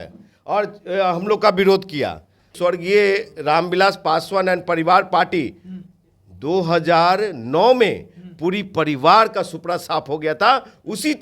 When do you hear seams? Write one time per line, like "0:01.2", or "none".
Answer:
0:02.5